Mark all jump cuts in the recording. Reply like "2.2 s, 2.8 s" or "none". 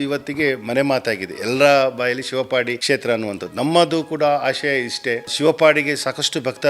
2.8 s, 5.3 s